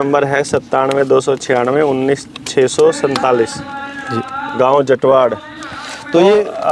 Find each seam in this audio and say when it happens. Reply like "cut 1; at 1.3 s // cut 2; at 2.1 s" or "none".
none